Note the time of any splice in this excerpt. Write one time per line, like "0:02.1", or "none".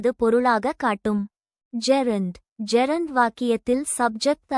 0:01.6